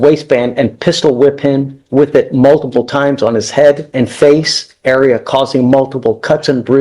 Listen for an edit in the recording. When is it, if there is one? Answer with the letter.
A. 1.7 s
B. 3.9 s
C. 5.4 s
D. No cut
B